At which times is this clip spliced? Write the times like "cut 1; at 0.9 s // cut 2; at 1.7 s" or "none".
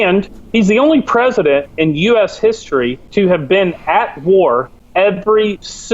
cut 1; at 3.0 s // cut 2; at 4.8 s